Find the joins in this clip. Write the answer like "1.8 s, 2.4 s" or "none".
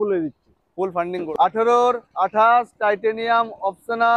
1.2 s